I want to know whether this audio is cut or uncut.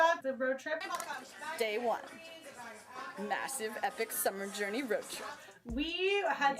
cut